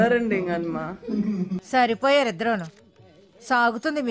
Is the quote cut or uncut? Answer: uncut